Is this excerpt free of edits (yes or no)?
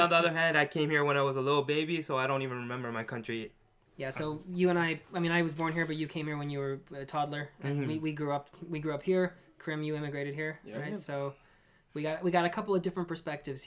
no